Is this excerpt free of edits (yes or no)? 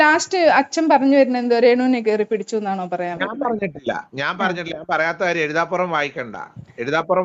yes